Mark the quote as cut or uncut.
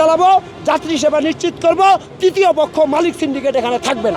uncut